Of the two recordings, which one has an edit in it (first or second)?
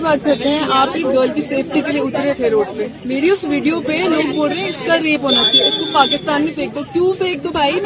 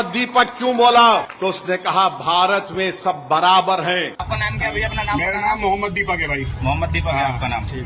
second